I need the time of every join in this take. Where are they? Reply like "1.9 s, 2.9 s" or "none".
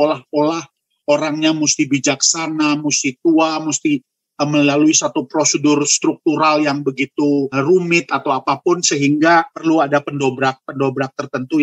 none